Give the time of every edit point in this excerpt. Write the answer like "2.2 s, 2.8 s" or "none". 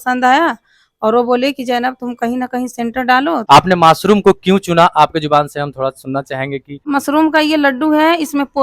3.4 s, 6.7 s